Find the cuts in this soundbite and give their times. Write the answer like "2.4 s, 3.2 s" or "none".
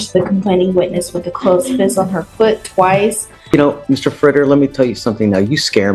3.5 s